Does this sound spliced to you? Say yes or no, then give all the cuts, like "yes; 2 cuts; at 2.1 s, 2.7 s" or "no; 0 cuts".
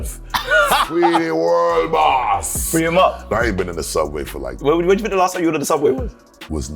yes; 1 cut; at 3.2 s